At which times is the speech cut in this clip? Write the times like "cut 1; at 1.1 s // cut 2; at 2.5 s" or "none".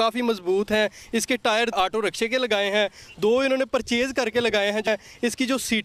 cut 1; at 1.7 s // cut 2; at 4.9 s